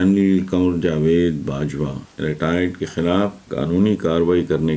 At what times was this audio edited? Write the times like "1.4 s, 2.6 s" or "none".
2.0 s, 3.4 s